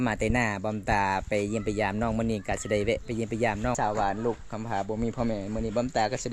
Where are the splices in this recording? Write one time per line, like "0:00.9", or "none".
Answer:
0:03.8